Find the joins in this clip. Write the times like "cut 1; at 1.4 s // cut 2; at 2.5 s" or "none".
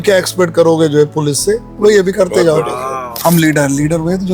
cut 1; at 3.1 s